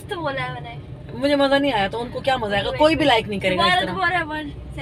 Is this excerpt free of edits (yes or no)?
yes